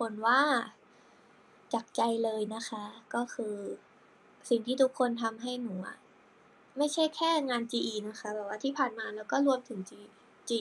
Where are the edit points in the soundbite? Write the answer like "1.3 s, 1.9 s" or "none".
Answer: none